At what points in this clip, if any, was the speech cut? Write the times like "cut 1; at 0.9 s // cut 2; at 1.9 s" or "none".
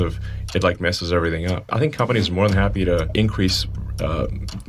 cut 1; at 1.7 s // cut 2; at 3.1 s